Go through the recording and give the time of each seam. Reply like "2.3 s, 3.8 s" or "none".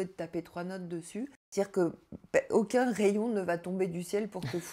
1.4 s